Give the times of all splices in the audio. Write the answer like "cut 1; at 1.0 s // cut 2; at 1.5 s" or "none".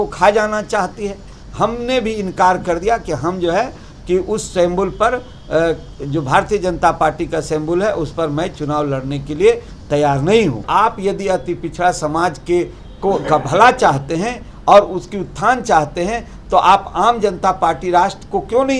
cut 1; at 1.4 s // cut 2; at 10.6 s